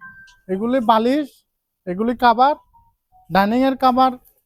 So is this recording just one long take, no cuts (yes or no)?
yes